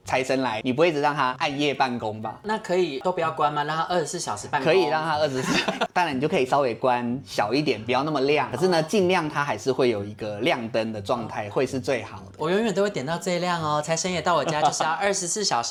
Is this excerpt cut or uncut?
uncut